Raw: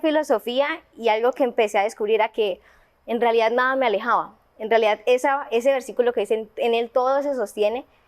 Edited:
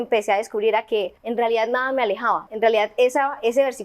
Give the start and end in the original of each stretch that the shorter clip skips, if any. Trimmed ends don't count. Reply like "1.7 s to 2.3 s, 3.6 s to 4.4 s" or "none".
2.7 s to 3.0 s, 4.3 s to 4.6 s